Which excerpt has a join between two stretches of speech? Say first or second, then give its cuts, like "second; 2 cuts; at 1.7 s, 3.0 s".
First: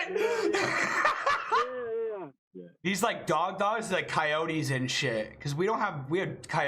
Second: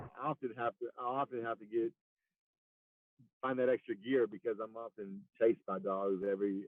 first; 1 cut; at 2.3 s